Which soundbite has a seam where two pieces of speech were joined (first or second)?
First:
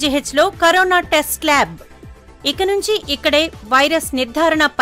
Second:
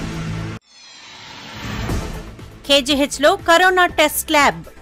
second